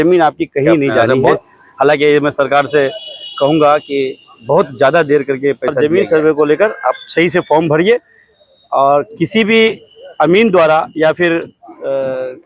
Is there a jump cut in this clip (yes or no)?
yes